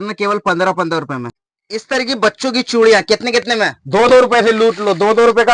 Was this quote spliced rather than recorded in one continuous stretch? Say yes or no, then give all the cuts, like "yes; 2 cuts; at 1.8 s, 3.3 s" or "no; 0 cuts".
no; 0 cuts